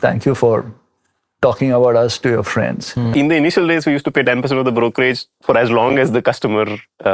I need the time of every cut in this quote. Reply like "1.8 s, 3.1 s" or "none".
3.1 s

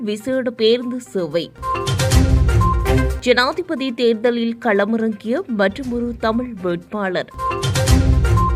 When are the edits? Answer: none

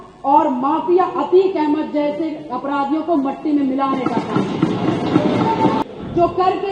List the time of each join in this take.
5.8 s

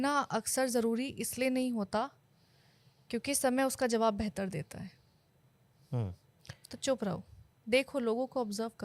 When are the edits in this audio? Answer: none

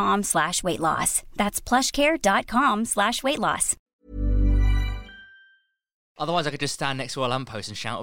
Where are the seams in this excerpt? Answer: 3.9 s, 6.1 s

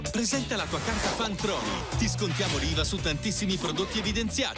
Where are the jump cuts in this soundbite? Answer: none

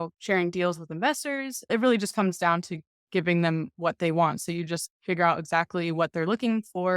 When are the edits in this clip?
1.7 s

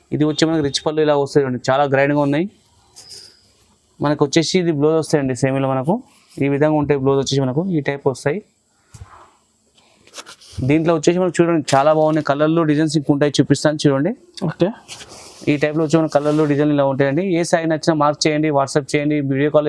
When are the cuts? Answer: none

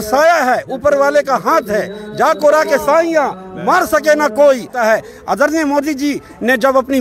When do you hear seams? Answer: 4.7 s

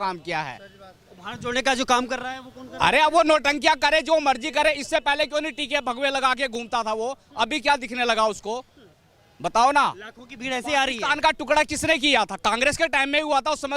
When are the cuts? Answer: none

